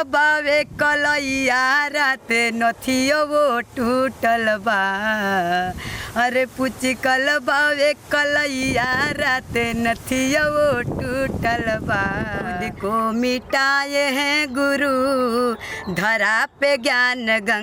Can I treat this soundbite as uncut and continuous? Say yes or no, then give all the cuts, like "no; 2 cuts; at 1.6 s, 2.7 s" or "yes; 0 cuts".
no; 1 cut; at 12.7 s